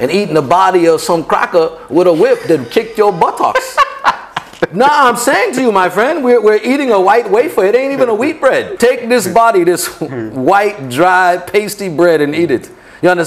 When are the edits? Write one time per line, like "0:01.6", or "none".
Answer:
0:08.7